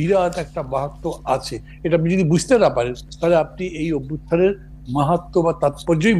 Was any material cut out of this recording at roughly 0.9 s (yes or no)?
no